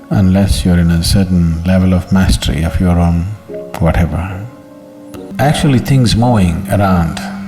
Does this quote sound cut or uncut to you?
cut